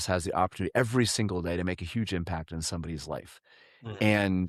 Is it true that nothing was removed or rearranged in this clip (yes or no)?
yes